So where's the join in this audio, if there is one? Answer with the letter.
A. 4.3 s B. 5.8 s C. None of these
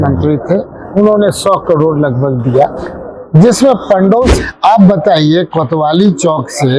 A